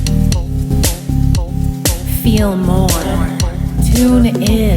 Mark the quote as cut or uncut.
cut